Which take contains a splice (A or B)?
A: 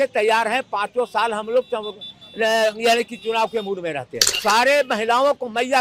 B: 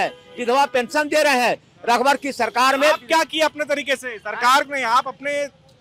A